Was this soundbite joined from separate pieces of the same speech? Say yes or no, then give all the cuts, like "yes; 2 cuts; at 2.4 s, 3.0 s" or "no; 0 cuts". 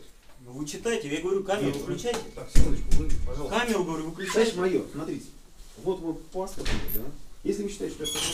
no; 0 cuts